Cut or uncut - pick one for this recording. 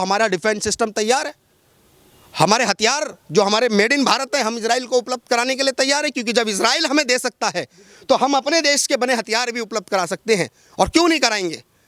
uncut